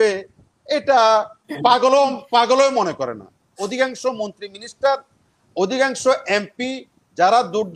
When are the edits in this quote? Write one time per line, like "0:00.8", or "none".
0:03.5